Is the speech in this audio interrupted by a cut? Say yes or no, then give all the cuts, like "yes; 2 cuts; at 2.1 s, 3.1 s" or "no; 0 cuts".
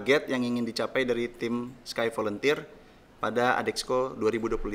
no; 0 cuts